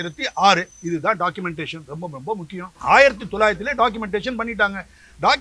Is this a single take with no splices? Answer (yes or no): no